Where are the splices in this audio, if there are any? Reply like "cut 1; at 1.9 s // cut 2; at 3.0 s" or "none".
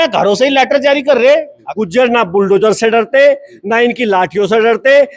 cut 1; at 1.6 s

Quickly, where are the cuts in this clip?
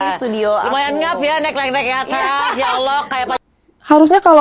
cut 1; at 3.4 s

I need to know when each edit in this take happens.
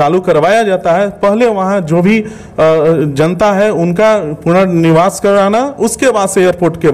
none

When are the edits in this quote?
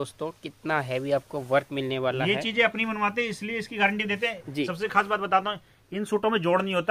none

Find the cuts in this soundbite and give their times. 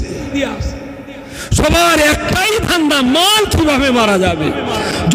none

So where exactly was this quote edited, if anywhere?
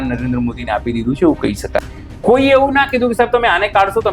cut 1; at 1.9 s

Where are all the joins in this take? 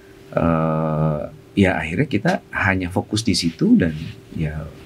none

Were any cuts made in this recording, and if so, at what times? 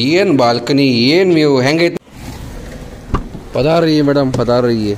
cut 1; at 1.9 s

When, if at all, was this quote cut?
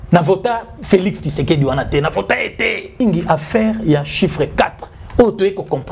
cut 1; at 3.0 s

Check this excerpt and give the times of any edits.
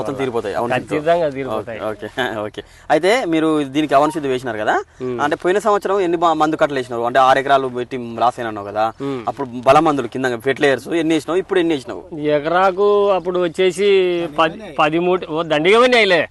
none

